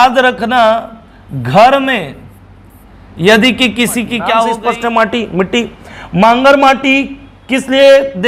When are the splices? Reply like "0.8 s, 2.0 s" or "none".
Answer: 4.6 s